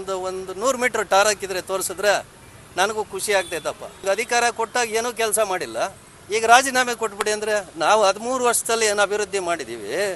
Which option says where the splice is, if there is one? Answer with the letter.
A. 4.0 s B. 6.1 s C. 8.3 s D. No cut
A